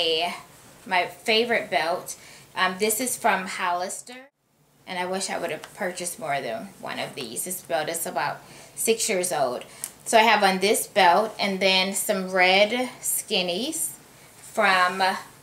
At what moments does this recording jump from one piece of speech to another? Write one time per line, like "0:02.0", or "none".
0:04.0